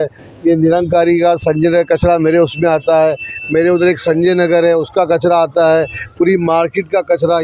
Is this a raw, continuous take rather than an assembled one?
yes; 0 cuts

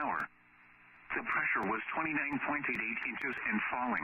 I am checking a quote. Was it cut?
yes; 1 cut; at 2.4 s

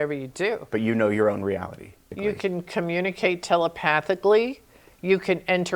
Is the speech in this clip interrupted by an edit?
yes; 1 cut; at 2.1 s

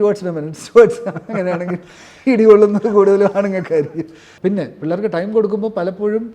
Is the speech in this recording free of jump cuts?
no; 1 cut; at 4.2 s

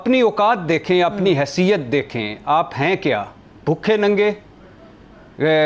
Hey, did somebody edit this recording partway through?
no; 0 cuts

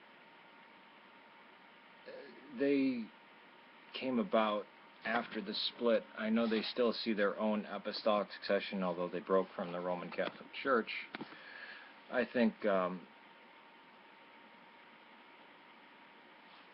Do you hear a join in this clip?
yes; 1 cut; at 9.3 s

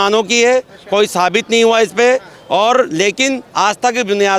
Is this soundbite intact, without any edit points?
yes; 0 cuts

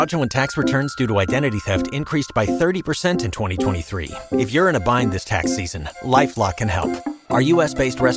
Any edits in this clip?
no; 0 cuts

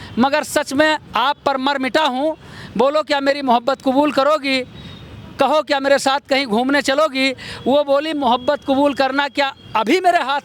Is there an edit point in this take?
no; 0 cuts

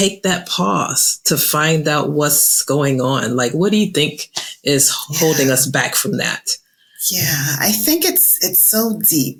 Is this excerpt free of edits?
yes; 0 cuts

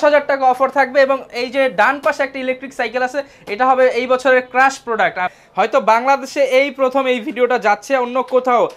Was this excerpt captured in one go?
no; 1 cut; at 5.4 s

